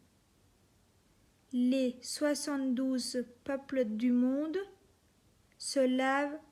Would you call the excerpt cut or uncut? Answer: uncut